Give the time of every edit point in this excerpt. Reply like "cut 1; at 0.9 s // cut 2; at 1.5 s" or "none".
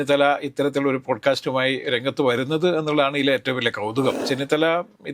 cut 1; at 4.2 s